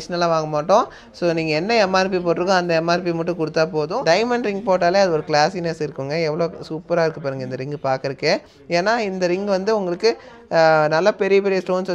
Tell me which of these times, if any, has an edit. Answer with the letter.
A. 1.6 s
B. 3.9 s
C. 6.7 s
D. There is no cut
B